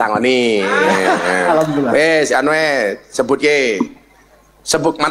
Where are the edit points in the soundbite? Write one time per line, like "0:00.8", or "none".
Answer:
none